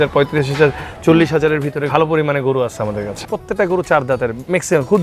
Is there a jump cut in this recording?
yes; 2 cuts; at 1.9 s, 3.2 s

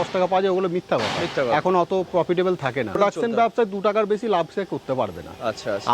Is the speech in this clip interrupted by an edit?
yes; 1 cut; at 3.0 s

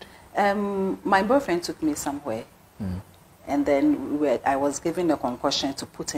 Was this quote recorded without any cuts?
yes; 0 cuts

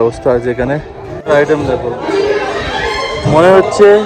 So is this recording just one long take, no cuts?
no; 1 cut; at 1.3 s

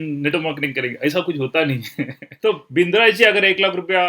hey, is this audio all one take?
no; 1 cut; at 2.2 s

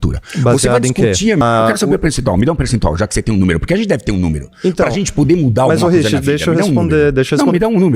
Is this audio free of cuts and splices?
no; 1 cut; at 1.4 s

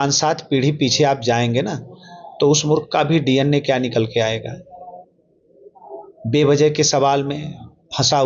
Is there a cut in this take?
no; 0 cuts

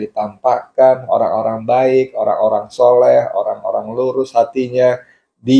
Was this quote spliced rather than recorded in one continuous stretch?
no; 0 cuts

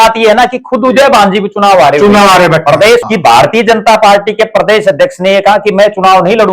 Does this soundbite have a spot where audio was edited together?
yes; 1 cut; at 3.0 s

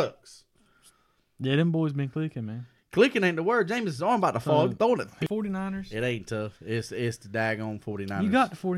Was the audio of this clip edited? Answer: yes; 1 cut; at 5.1 s

